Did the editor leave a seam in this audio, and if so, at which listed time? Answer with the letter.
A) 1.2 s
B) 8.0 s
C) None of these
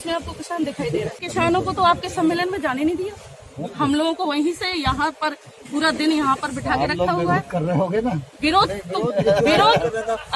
A